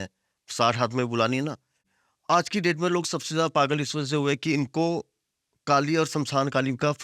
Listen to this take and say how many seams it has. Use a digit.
1